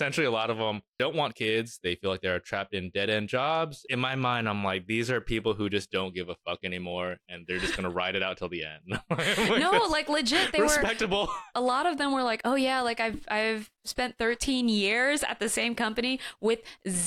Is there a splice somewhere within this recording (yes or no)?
yes